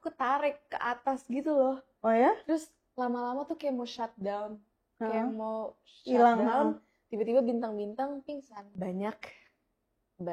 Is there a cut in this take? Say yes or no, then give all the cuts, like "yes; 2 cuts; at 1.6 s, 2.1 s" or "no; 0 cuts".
yes; 1 cut; at 8.6 s